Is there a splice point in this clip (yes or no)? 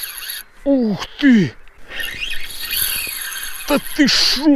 yes